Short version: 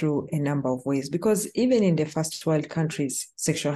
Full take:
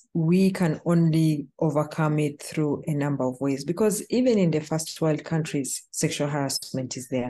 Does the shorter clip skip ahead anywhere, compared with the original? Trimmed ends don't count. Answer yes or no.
no